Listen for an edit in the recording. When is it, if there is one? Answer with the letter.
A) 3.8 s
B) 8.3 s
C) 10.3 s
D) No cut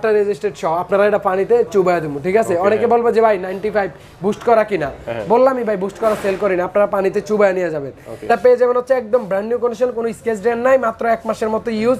B